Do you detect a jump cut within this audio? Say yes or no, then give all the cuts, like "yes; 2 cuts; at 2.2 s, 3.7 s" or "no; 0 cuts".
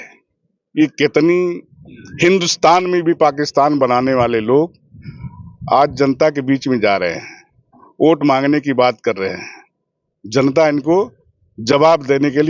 no; 0 cuts